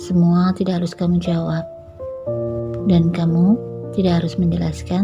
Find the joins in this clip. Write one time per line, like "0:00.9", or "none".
none